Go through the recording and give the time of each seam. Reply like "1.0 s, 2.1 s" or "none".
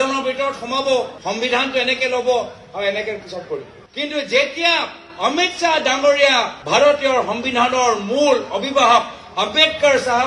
6.6 s